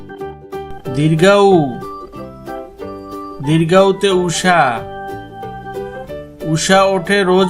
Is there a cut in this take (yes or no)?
yes